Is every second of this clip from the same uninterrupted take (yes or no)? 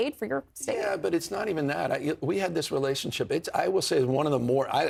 yes